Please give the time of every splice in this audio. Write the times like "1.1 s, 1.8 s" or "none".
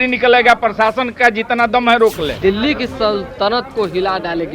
2.4 s